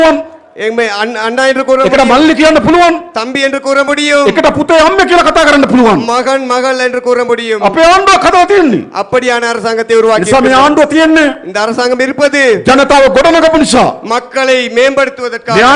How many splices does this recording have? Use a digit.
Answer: 0